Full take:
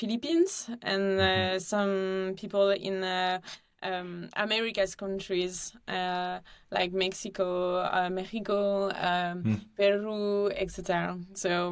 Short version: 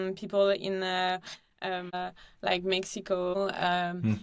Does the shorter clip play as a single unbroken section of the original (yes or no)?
no